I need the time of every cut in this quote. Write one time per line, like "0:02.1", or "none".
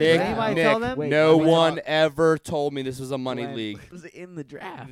0:03.9